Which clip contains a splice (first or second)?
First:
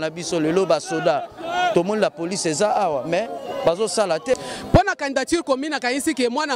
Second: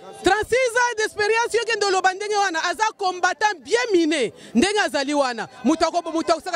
first